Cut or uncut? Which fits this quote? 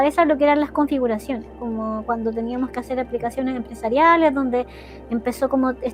uncut